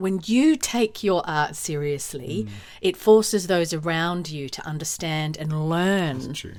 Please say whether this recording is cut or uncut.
uncut